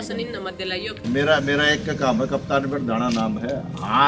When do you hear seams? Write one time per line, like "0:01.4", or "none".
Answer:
0:01.0